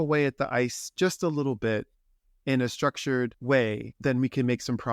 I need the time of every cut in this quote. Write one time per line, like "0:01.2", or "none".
0:03.4